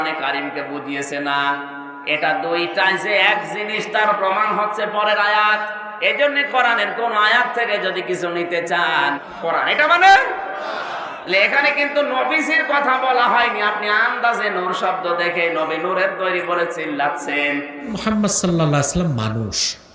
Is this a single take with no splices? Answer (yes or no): no